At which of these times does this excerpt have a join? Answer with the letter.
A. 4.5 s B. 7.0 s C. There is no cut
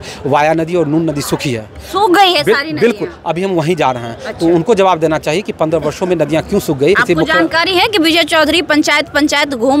B